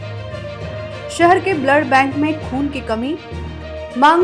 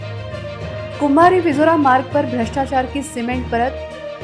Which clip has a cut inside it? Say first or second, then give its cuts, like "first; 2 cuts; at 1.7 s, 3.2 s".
first; 1 cut; at 1.0 s